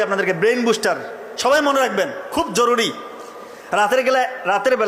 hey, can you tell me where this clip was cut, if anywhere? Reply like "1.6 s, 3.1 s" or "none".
none